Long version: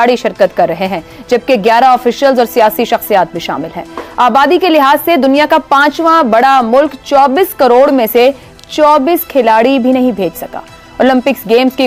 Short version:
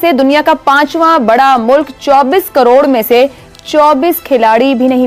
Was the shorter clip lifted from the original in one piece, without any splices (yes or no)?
yes